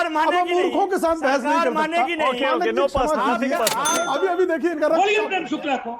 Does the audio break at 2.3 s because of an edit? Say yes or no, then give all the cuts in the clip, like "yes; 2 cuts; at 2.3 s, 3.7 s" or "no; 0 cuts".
no; 1 cut; at 4.1 s